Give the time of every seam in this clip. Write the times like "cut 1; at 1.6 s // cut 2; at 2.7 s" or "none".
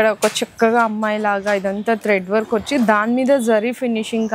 none